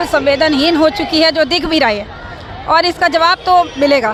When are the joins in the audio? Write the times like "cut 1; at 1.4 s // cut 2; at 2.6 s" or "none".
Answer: none